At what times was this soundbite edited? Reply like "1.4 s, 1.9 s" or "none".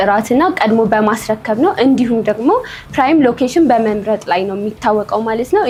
none